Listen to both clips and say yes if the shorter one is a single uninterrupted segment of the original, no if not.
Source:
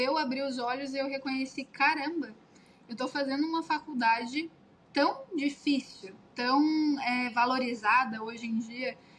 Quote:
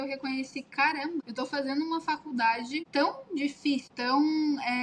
no